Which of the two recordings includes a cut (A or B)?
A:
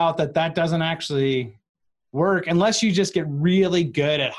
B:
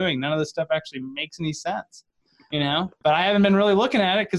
B